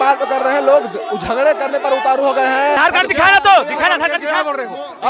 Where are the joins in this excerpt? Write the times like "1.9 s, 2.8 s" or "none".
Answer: 2.8 s